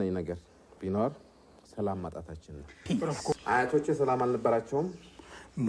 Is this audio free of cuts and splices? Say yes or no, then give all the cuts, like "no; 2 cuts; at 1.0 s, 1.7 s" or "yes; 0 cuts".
no; 1 cut; at 3.1 s